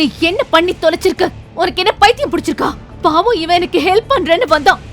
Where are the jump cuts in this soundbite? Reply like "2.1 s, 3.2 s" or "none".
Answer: 2.8 s